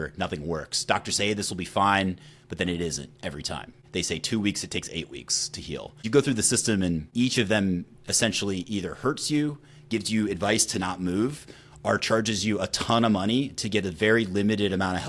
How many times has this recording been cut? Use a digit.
3